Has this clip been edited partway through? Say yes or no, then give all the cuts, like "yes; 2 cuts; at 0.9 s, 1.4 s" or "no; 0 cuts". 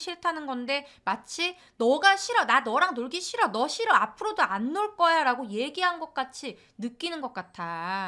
no; 0 cuts